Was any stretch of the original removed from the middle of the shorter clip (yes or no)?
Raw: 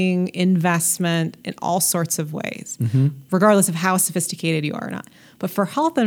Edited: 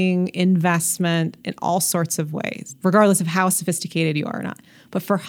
yes